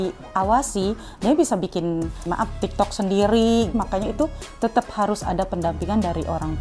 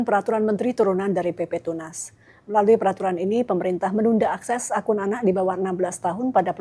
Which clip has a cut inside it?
first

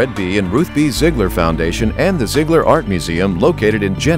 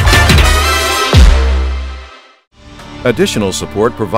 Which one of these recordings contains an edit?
second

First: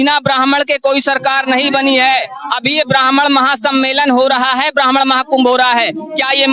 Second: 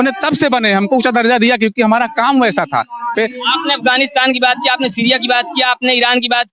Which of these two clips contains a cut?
second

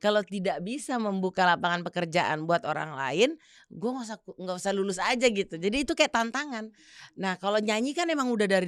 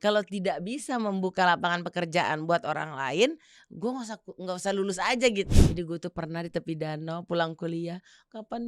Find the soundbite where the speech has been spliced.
second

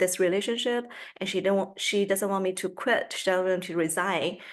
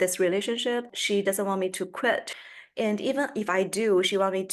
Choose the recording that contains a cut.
second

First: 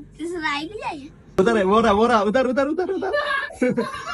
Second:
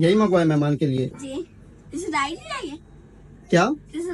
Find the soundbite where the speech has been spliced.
first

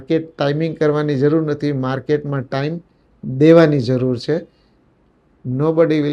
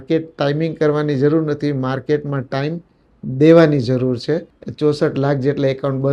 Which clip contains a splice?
second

